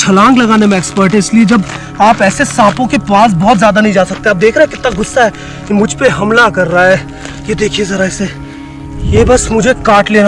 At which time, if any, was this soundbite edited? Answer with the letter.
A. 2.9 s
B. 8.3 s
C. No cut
C